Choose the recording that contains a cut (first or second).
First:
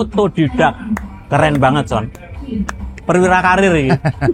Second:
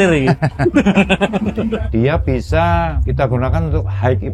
second